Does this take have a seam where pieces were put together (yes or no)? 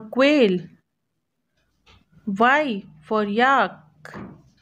yes